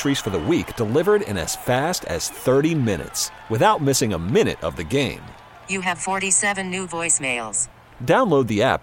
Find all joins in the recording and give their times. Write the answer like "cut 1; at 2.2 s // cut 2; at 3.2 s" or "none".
none

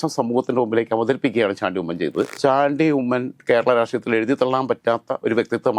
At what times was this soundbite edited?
cut 1; at 2.3 s

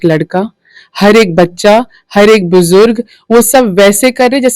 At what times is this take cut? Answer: none

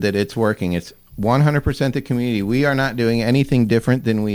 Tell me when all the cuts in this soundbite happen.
none

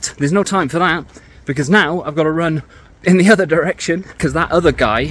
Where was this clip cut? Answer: cut 1; at 4.1 s

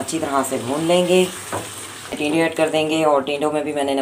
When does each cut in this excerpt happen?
cut 1; at 2.2 s

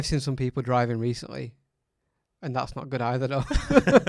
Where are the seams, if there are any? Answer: none

